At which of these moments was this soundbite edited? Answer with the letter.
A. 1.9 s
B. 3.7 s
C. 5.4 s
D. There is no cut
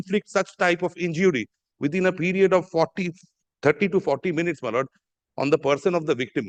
D